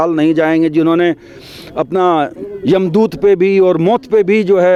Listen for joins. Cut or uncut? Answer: uncut